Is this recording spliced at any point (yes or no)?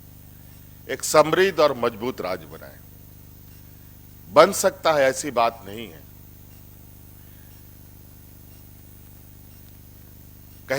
no